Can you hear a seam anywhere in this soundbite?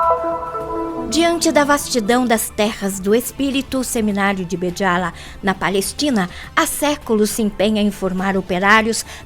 yes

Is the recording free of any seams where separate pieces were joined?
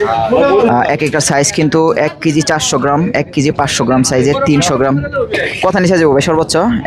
yes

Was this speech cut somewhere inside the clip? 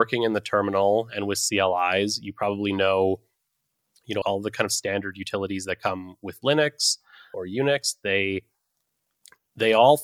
yes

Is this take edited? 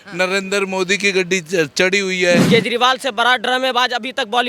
yes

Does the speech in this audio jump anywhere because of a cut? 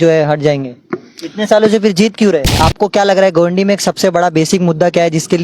yes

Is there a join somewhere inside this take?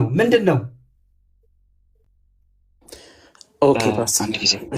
no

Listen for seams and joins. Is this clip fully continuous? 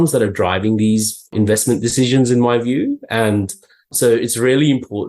no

